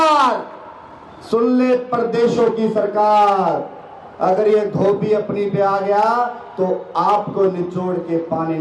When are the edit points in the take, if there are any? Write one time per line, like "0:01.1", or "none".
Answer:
none